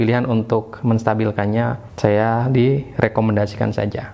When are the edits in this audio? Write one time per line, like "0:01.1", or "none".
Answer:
0:01.9